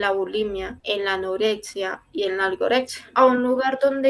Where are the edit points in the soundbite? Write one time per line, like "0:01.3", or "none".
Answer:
0:03.0